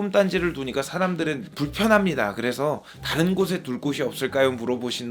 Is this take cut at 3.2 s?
no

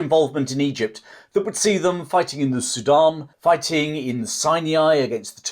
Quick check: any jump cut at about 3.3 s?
yes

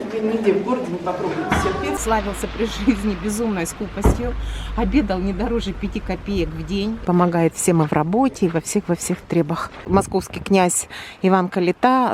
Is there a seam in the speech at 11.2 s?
no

